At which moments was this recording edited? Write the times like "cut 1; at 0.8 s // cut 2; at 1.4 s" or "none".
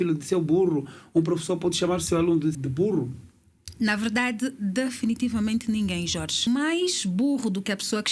cut 1; at 2.6 s // cut 2; at 6.5 s